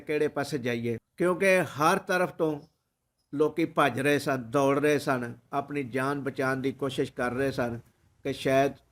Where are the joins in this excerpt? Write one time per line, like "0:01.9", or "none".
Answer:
0:01.1